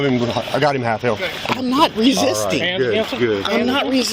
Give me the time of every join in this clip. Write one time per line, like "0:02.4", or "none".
none